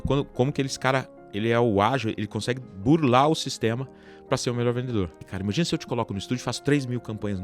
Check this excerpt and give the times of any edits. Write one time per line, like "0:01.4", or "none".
0:05.2

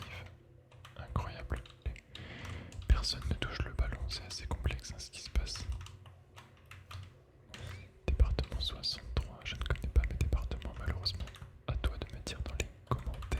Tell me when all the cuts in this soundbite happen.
0:02.0
0:07.5
0:11.5

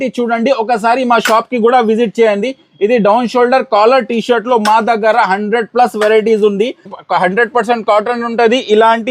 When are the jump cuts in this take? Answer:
0:06.9

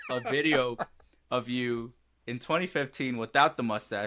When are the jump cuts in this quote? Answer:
none

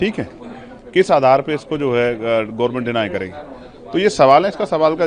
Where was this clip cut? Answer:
none

